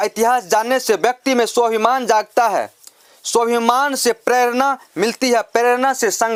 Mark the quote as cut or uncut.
uncut